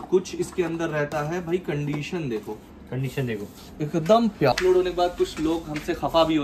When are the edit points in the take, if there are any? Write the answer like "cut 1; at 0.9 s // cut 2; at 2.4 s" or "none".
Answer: cut 1; at 4.5 s